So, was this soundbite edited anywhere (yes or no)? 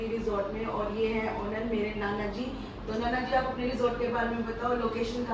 no